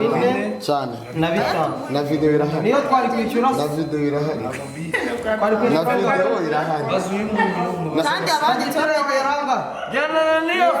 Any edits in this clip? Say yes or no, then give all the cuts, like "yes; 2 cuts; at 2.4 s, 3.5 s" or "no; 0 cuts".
no; 0 cuts